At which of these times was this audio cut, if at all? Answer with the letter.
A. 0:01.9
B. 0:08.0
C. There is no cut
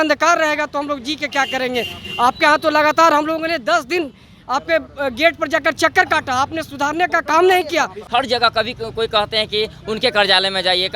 B